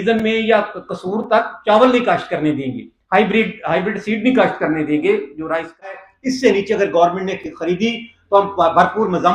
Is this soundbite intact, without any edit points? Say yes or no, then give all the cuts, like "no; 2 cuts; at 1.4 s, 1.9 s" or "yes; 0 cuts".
no; 1 cut; at 5.9 s